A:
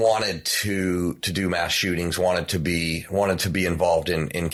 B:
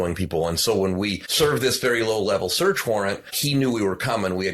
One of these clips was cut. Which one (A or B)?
B